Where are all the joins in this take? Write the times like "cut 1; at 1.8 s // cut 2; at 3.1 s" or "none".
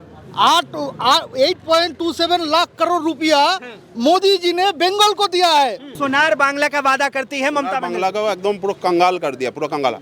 cut 1; at 6.0 s